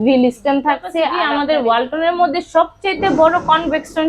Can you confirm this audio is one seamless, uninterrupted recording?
no; 1 cut; at 1.2 s

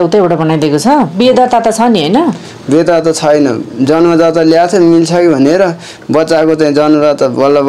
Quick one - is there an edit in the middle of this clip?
no; 0 cuts

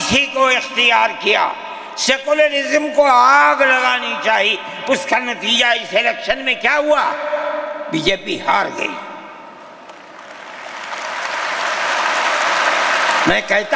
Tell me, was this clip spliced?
no; 0 cuts

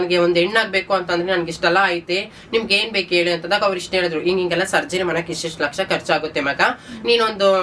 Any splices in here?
no; 0 cuts

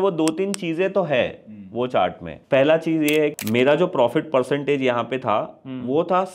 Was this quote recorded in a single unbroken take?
no; 2 cuts; at 2.3 s, 3.3 s

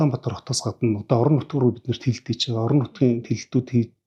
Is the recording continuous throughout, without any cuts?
yes; 0 cuts

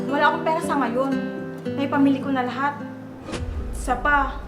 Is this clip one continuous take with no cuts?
yes; 0 cuts

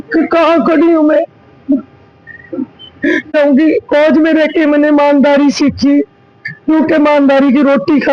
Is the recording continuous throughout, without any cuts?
no; 1 cut; at 3.3 s

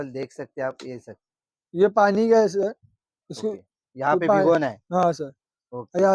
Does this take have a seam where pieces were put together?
no; 0 cuts

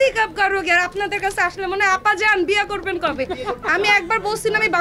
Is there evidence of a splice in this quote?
yes; 1 cut; at 3.5 s

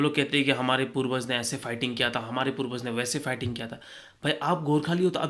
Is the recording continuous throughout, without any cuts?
yes; 0 cuts

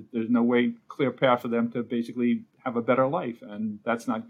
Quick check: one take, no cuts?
yes; 0 cuts

